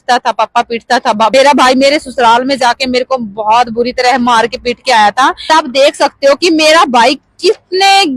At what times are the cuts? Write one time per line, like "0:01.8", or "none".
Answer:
0:01.3
0:05.4